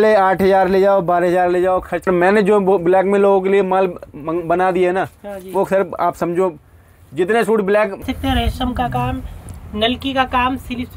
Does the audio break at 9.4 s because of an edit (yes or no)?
no